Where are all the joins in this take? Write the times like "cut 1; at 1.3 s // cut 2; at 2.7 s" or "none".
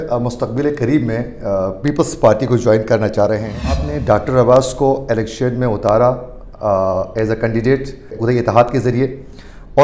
cut 1; at 3.8 s // cut 2; at 8.2 s